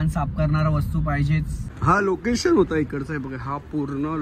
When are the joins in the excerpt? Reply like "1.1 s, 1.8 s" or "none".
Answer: 1.7 s

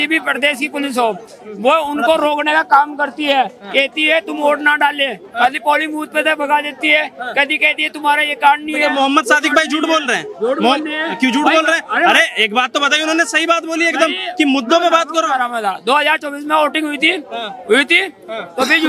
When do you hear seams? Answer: none

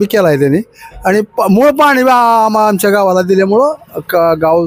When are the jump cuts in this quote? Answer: none

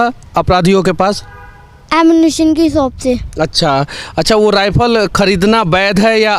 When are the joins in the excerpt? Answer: none

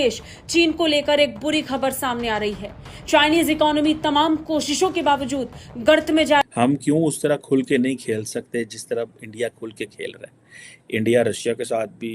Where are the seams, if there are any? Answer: 6.4 s

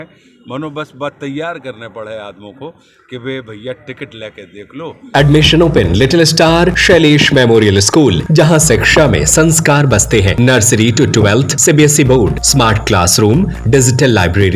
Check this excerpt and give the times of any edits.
5.1 s, 6.8 s, 8.2 s, 10.3 s, 11.5 s, 12.4 s, 13.6 s

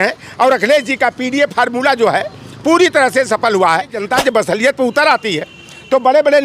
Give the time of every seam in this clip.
4.0 s

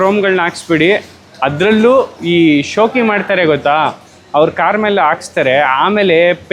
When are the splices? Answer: none

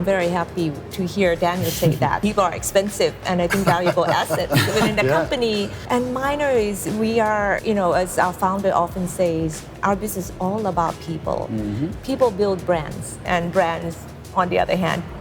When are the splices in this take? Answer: 2.2 s, 5.8 s, 7.6 s, 13.2 s

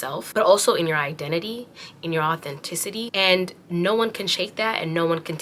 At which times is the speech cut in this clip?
none

